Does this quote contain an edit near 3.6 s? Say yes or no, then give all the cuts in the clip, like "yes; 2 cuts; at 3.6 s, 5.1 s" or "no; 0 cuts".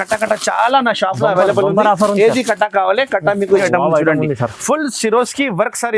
yes; 1 cut; at 3.6 s